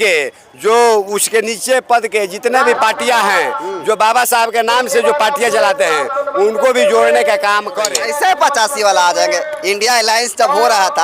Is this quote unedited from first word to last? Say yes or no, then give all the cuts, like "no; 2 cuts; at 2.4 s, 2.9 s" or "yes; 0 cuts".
no; 1 cut; at 8.0 s